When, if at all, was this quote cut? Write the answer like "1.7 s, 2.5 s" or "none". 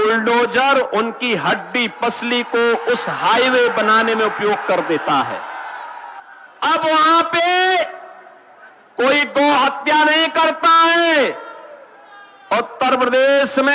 6.0 s